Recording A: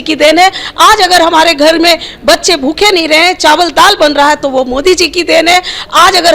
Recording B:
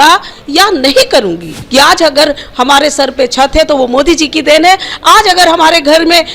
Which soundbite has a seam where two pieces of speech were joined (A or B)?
B